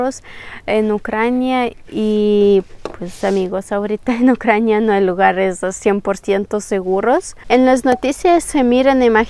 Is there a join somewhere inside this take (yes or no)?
yes